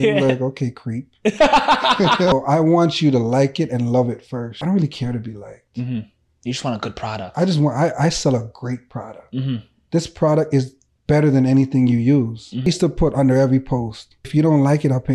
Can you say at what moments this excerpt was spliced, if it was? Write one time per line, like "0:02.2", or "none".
0:02.3
0:04.5
0:12.7
0:14.3